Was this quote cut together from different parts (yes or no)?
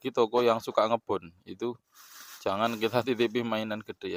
no